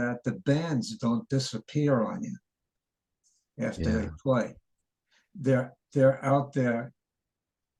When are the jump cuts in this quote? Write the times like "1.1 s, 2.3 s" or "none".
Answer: none